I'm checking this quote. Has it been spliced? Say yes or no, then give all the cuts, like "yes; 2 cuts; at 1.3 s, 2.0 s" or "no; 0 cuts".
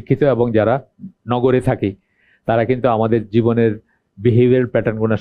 no; 0 cuts